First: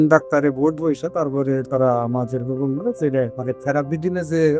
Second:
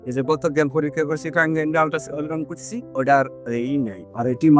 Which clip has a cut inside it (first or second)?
first